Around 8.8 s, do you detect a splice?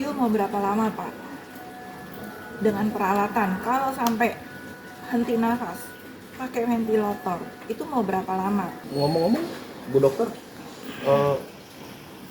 yes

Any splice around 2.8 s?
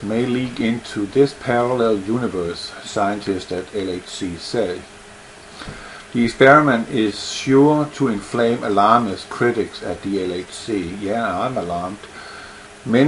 yes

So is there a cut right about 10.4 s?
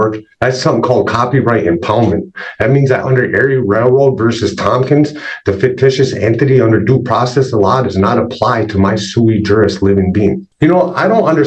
yes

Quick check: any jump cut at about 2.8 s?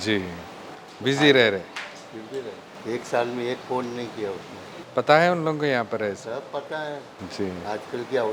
yes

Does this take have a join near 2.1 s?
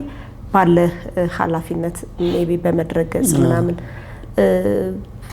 no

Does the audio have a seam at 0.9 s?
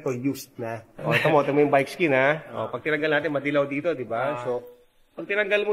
yes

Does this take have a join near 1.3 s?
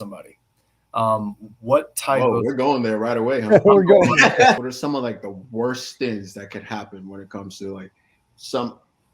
no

